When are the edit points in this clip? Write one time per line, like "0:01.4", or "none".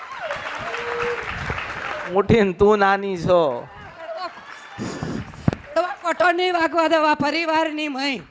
0:02.1